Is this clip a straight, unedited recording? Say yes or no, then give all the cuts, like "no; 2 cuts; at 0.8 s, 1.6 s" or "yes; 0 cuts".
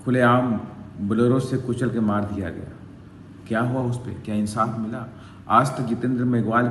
yes; 0 cuts